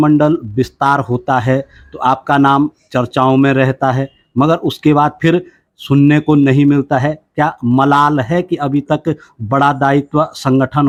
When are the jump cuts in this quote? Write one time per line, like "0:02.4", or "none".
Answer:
none